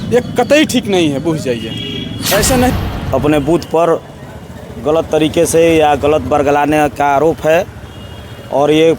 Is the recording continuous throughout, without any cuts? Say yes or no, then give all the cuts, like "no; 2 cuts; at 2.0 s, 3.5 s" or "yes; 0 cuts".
no; 1 cut; at 2.7 s